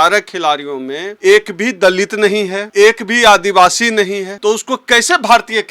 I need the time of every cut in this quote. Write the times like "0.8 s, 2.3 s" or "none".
1.1 s, 2.6 s, 4.3 s